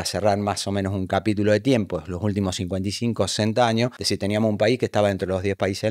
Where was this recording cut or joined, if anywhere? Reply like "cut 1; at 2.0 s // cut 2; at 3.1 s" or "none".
cut 1; at 4.0 s